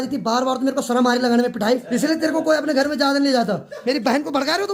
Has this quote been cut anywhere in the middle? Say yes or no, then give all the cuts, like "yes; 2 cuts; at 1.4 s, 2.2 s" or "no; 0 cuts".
yes; 2 cuts; at 1.8 s, 3.7 s